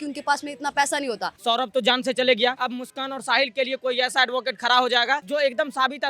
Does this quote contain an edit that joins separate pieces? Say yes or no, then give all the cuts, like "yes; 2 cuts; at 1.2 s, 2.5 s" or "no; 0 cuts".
yes; 3 cuts; at 1.3 s, 2.6 s, 5.2 s